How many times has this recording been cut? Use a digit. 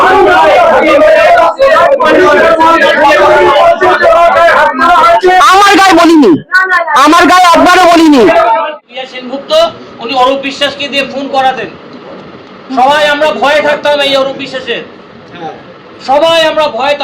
1